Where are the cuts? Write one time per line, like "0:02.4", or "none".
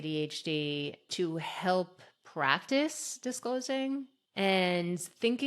0:01.1
0:04.2